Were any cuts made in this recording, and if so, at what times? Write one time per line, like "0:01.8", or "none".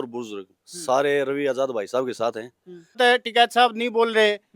0:03.0